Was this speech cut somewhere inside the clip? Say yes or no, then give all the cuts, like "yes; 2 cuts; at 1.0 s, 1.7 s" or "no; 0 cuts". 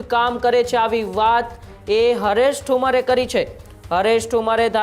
no; 0 cuts